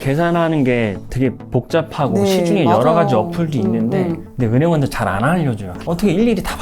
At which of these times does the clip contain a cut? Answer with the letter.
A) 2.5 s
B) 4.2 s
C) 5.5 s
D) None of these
B